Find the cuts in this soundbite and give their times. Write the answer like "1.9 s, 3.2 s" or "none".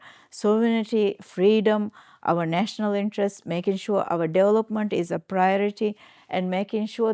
none